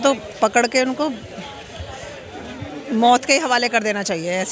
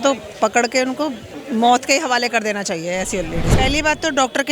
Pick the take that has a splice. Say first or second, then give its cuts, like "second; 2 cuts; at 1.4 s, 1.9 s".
second; 2 cuts; at 1.3 s, 3.5 s